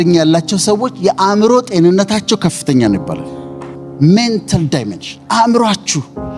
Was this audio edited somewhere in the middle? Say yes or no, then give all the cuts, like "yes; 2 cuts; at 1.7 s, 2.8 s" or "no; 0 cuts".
yes; 1 cut; at 3.7 s